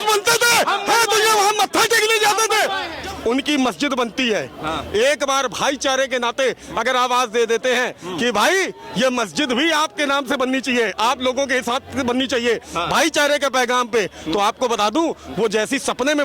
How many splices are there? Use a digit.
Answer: 1